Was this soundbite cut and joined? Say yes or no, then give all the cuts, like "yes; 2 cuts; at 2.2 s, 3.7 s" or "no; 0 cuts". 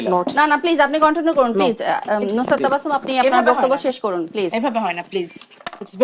no; 0 cuts